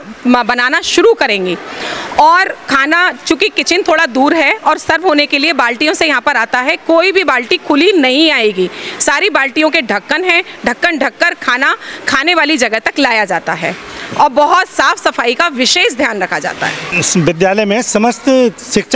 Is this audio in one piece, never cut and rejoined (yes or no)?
yes